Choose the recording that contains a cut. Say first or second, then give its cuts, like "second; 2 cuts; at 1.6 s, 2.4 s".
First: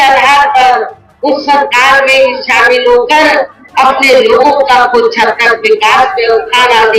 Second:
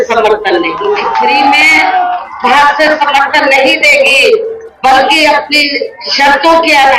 second; 1 cut; at 1.0 s